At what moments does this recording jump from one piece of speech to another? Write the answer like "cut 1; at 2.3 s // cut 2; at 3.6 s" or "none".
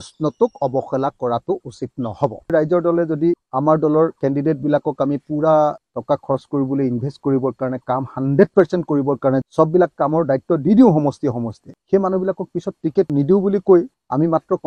cut 1; at 2.5 s // cut 2; at 9.5 s